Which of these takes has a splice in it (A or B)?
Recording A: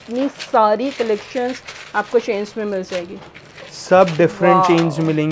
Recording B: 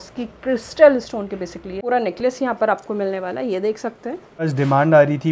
B